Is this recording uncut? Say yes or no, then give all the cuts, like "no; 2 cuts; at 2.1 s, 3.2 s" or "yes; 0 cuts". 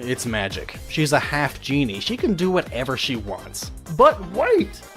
no; 1 cut; at 2.5 s